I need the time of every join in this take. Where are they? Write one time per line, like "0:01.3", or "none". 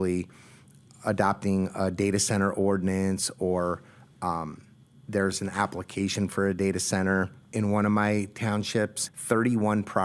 0:07.4
0:09.0